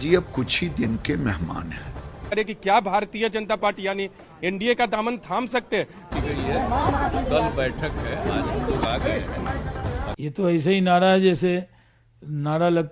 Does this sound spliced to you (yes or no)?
yes